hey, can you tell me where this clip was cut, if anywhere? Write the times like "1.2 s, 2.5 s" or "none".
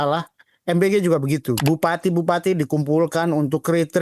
1.6 s